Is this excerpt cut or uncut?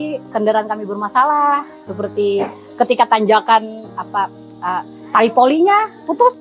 uncut